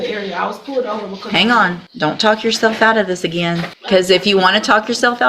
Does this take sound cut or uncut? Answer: cut